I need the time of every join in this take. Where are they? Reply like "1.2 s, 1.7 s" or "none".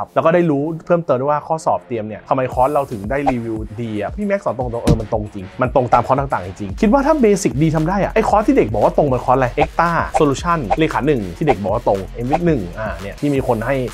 6.7 s, 13.0 s